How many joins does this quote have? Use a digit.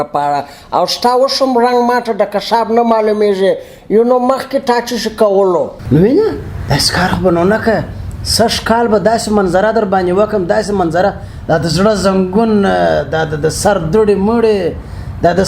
1